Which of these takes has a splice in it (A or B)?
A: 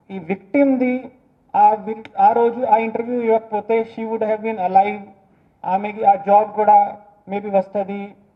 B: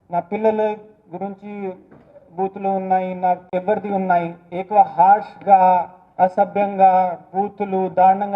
B